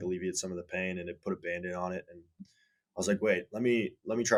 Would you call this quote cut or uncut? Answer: uncut